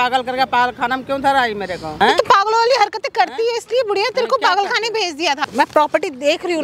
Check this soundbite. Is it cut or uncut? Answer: cut